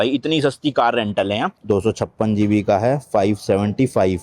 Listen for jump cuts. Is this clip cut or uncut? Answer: cut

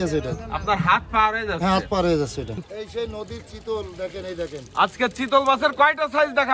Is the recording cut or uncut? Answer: cut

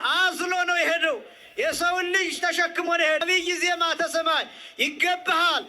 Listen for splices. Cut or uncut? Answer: cut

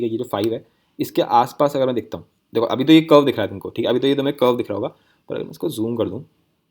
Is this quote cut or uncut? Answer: uncut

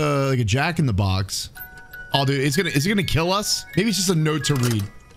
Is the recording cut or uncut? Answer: cut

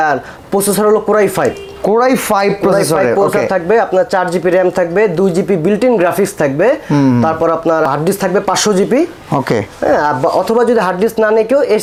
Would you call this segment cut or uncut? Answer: uncut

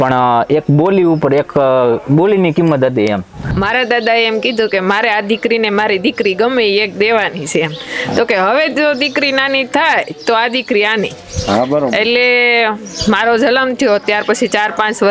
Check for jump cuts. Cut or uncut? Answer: cut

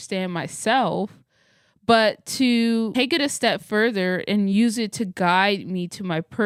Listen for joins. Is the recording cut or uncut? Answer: uncut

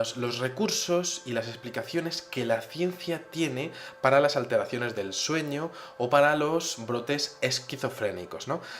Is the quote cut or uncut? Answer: cut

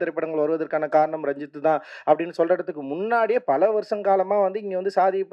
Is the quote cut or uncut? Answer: uncut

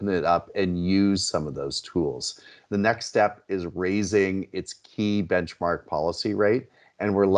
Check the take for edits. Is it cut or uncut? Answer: cut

